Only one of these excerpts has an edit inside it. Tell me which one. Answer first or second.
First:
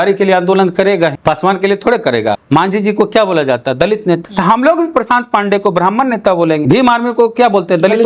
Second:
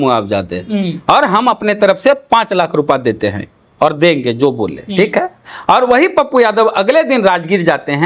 first